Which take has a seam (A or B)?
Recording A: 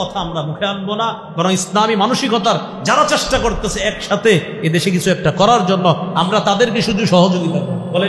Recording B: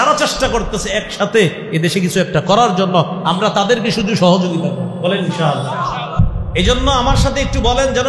B